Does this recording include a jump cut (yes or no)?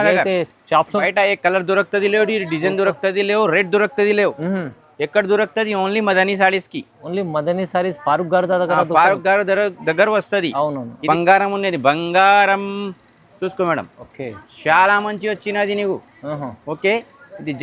yes